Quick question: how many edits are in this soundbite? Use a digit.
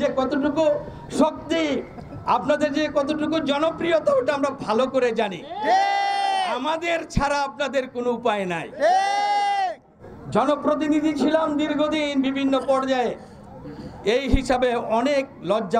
0